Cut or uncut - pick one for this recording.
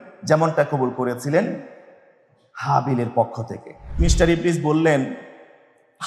cut